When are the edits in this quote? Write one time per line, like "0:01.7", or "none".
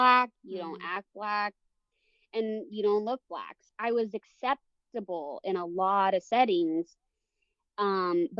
0:03.6

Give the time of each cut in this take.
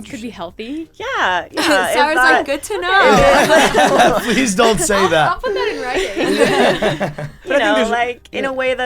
none

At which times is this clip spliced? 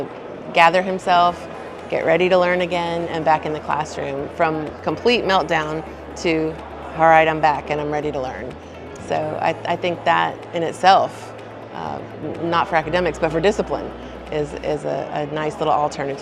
none

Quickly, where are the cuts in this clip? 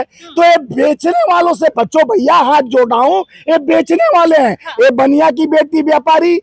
none

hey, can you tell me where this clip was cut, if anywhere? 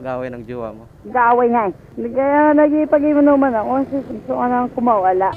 0:00.9
0:01.9
0:04.1

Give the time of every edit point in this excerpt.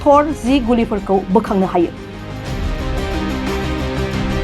0:02.1

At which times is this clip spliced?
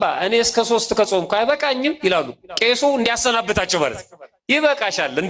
none

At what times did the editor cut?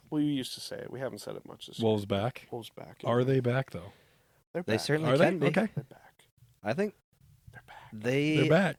none

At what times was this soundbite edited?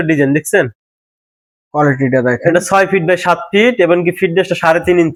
none

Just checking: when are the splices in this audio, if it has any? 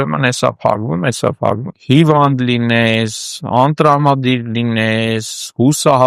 0:01.7

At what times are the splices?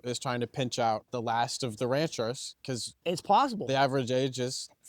0:01.1

